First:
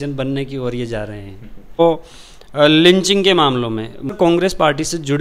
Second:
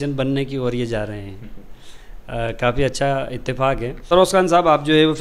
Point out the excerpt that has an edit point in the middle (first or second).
first